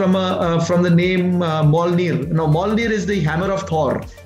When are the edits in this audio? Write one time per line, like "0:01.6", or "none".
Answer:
none